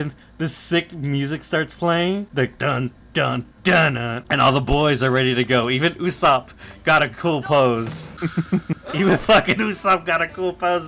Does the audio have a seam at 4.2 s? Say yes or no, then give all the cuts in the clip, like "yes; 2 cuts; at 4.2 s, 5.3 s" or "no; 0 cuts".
yes; 3 cuts; at 2.3 s, 4.2 s, 8.0 s